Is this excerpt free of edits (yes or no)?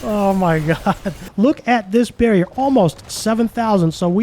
no